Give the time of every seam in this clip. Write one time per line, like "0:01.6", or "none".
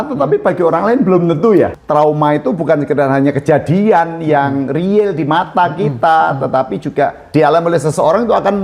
0:01.8
0:07.2